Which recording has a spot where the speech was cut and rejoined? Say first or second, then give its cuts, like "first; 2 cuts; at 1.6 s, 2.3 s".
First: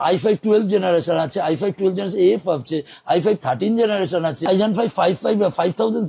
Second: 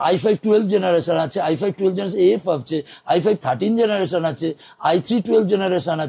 first; 1 cut; at 4.5 s